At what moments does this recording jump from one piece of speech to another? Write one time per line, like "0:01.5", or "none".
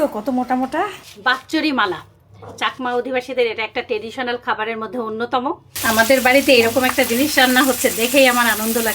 0:01.0
0:05.7